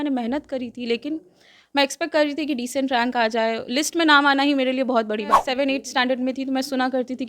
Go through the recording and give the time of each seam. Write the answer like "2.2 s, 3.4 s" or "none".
5.4 s